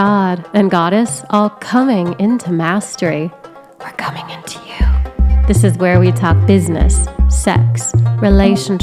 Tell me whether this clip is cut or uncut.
uncut